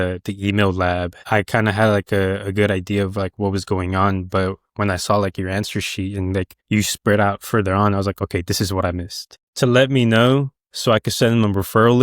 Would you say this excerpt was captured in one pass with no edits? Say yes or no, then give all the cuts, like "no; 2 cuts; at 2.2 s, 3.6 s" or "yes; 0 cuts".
no; 1 cut; at 9.4 s